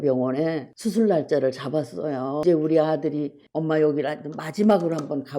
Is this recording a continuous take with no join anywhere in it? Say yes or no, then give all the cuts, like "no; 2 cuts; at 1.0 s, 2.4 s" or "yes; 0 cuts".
no; 1 cut; at 2.4 s